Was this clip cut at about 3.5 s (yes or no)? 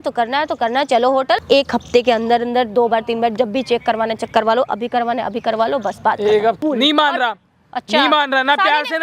no